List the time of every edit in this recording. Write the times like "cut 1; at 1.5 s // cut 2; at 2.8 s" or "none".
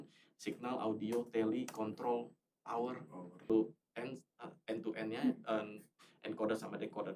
cut 1; at 3.5 s

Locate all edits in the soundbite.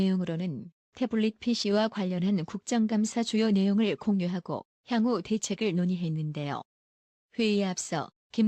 cut 1; at 2.0 s

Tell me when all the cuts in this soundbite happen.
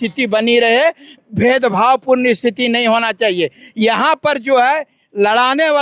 none

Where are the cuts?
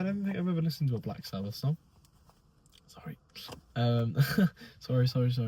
none

